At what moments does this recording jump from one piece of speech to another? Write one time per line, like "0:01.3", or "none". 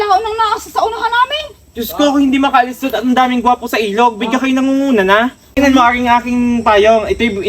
0:05.5